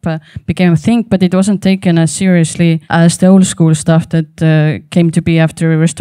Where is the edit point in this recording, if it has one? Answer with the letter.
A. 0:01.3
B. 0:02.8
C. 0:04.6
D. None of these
B